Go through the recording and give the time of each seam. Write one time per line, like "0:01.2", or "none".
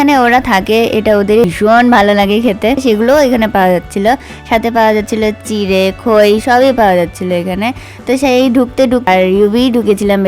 0:01.5
0:09.1